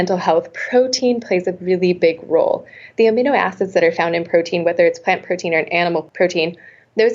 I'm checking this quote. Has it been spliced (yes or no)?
yes